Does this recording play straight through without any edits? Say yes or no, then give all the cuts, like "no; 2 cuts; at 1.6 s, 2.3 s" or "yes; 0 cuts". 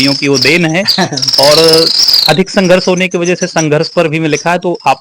yes; 0 cuts